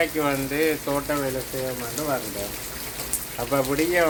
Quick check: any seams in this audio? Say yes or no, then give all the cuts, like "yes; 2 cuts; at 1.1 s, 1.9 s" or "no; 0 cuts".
no; 0 cuts